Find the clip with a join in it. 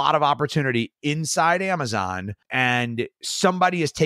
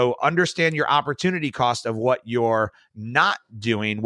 first; 1 cut; at 2.4 s

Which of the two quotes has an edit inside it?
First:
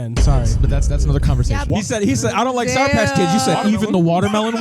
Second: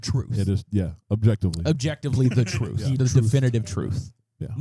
first; 1 cut; at 1.7 s

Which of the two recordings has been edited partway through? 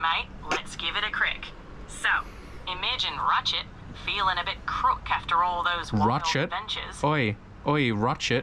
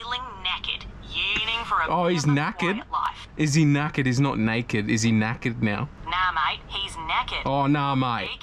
second; 1 cut; at 6.0 s

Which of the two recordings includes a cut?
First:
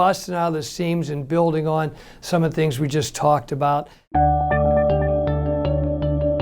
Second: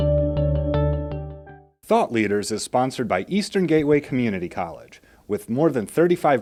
first; 1 cut; at 4.0 s

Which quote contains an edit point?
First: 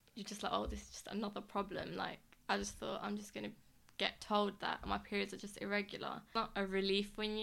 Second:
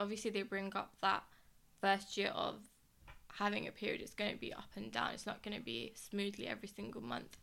first; 1 cut; at 6.3 s

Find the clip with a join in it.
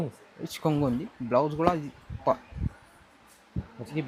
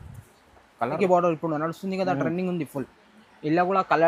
second; 1 cut; at 1.0 s

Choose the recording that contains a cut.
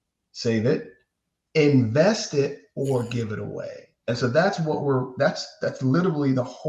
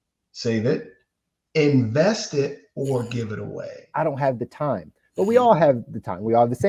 second; 1 cut; at 3.8 s

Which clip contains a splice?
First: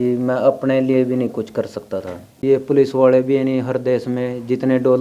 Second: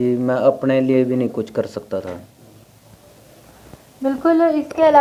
first; 1 cut; at 2.4 s

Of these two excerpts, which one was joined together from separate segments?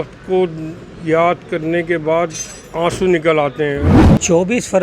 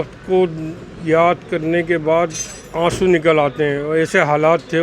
first; 1 cut; at 3.9 s

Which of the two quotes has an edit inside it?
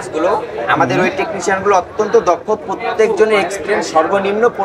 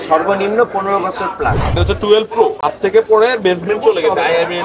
second; 2 cuts; at 1.7 s, 2.6 s

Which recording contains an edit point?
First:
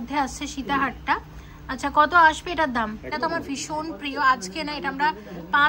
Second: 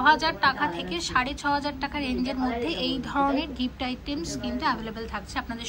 first; 1 cut; at 3.1 s

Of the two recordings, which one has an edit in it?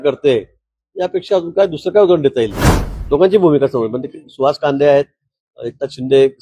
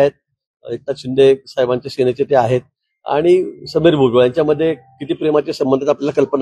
first; 1 cut; at 2.7 s

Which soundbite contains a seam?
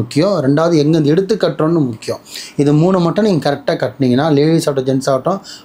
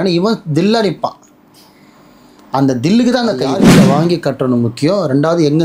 second; 1 cut; at 3.6 s

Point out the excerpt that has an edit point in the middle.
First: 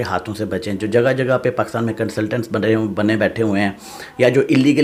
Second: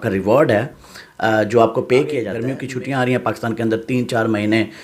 second; 1 cut; at 2.4 s

